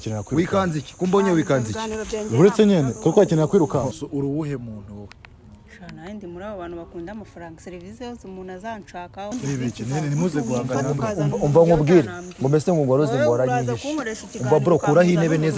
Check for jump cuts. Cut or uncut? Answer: cut